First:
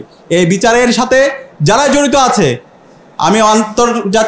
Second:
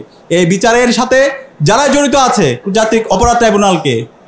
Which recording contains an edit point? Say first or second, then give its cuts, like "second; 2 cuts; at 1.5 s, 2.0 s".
second; 1 cut; at 2.6 s